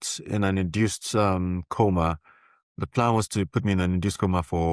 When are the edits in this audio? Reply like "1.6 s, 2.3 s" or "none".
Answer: none